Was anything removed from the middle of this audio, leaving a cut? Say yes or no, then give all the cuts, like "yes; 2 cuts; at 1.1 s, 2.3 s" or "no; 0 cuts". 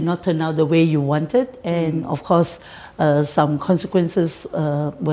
no; 0 cuts